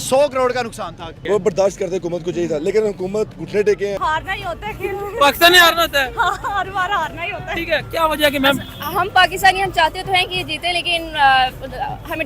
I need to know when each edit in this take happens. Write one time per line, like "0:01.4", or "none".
0:01.1
0:04.0